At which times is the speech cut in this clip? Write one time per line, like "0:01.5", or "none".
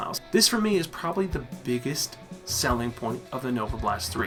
none

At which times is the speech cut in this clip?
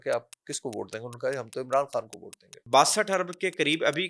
0:02.6

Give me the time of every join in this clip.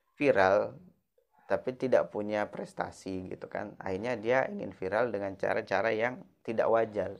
none

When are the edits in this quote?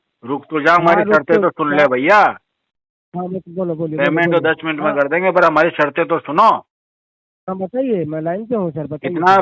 none

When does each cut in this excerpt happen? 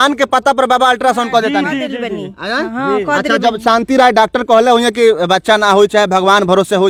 none

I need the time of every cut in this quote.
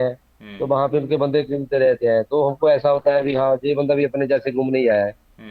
none

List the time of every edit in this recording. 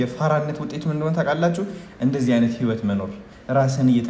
none

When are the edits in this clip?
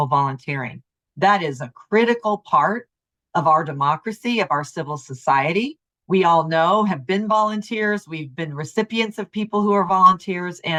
none

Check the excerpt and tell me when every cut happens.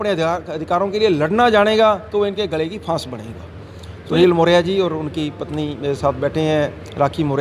0:04.2

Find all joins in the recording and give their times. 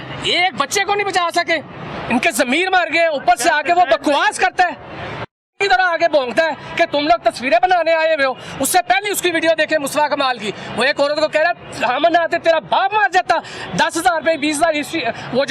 0:01.9

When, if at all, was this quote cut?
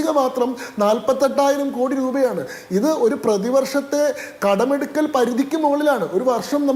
none

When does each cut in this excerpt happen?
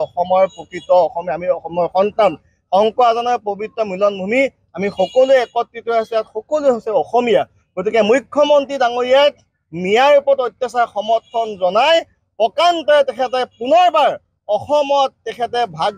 none

